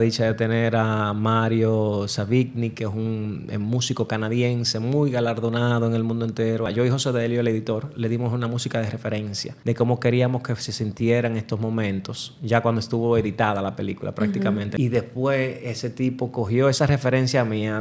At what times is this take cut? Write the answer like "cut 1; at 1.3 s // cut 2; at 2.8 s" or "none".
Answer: cut 1; at 6.7 s // cut 2; at 9.5 s // cut 3; at 14.7 s